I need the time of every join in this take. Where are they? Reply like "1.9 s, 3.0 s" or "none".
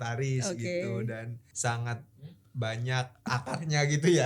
1.4 s, 3.3 s

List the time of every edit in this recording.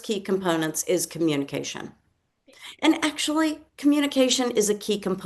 none

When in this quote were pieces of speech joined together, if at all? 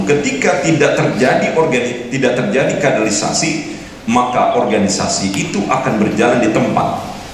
none

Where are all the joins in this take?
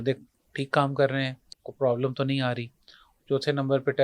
none

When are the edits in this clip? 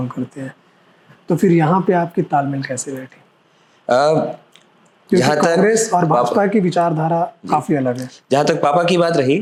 none

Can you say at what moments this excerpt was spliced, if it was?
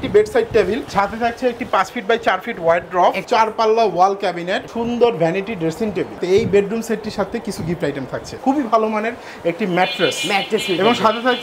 0.9 s, 3.2 s, 4.6 s, 6.2 s, 8.3 s

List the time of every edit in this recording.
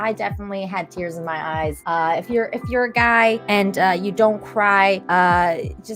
1.8 s, 3.4 s, 5.0 s

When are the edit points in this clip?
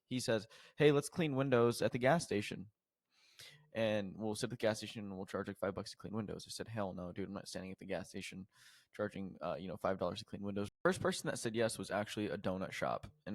10.8 s

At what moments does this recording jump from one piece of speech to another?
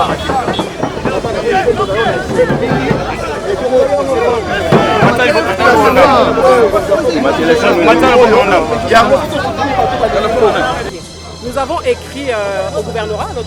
10.9 s

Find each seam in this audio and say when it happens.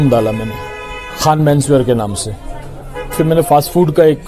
3.1 s

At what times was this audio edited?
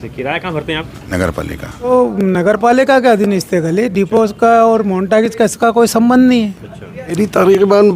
1.9 s, 6.7 s

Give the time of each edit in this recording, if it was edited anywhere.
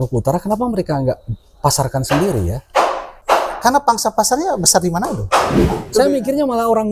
3.1 s, 5.9 s

